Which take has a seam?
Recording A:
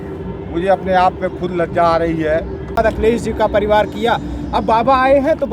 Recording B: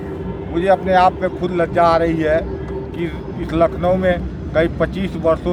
A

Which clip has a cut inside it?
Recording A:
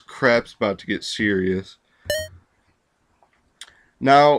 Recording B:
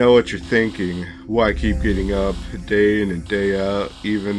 B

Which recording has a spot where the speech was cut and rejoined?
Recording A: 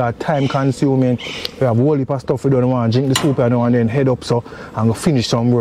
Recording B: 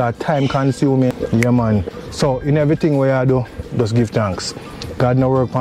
B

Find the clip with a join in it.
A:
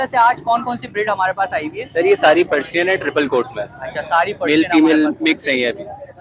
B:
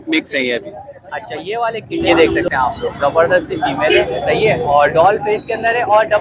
B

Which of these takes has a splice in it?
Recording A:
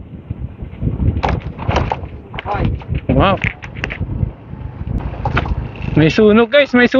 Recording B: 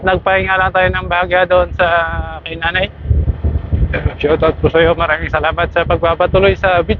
A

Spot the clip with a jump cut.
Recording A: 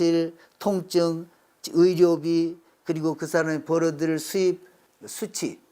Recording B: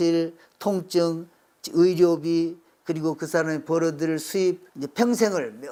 A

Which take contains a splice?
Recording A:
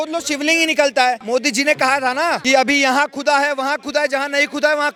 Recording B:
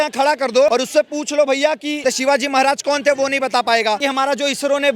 B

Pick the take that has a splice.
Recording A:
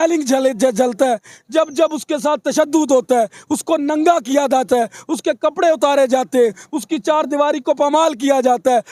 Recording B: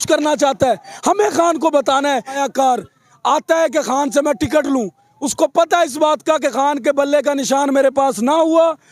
B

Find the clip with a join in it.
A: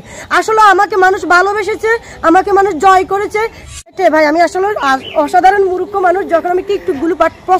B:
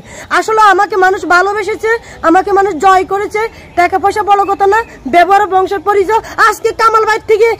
A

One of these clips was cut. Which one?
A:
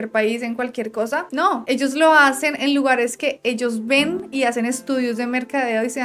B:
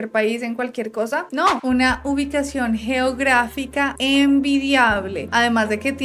B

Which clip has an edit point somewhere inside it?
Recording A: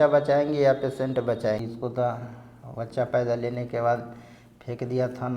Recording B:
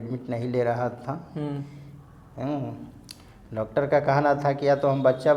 A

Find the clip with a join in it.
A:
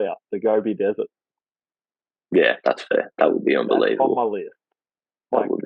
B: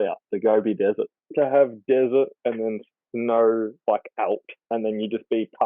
B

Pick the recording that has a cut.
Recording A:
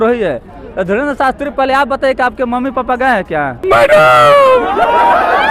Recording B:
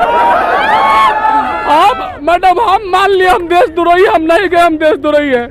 A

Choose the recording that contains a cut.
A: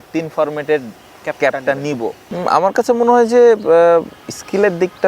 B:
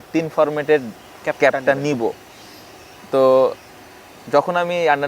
A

